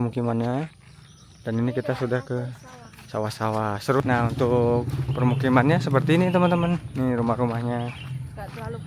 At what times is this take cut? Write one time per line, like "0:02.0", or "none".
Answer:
0:04.0